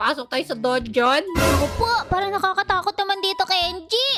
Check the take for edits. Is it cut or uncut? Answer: uncut